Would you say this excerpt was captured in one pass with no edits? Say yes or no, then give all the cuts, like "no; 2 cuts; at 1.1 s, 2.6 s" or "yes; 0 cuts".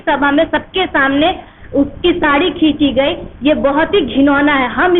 yes; 0 cuts